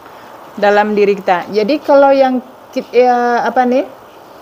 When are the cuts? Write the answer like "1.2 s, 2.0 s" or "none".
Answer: none